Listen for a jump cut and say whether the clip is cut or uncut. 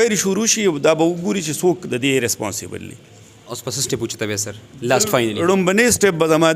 uncut